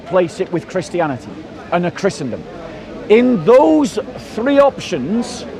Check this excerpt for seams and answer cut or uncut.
uncut